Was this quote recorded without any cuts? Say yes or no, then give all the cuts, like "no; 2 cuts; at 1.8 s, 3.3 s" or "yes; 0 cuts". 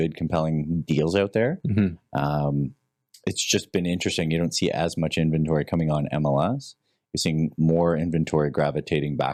yes; 0 cuts